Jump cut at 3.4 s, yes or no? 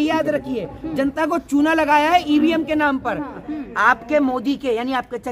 yes